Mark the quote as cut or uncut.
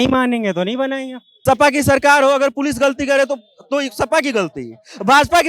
cut